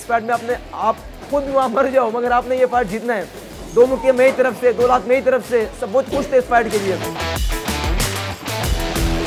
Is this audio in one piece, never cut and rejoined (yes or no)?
yes